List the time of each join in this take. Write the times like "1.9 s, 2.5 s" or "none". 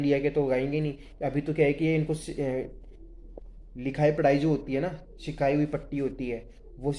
none